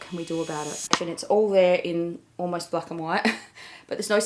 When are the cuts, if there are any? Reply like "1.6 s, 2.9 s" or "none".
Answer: 1.1 s